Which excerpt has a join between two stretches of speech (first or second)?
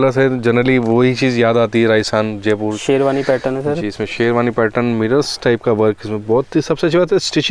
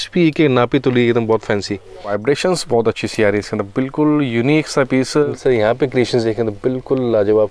second